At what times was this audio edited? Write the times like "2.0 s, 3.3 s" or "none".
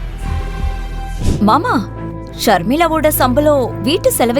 1.2 s